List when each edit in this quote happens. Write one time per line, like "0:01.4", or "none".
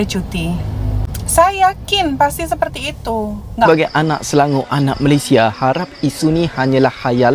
0:03.7